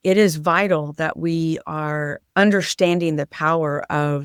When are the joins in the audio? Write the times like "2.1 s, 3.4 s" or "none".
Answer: none